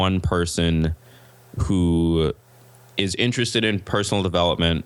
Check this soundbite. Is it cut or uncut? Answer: uncut